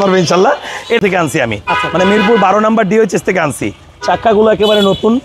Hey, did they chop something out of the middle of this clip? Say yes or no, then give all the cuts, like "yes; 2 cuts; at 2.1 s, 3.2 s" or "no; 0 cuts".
yes; 1 cut; at 1.0 s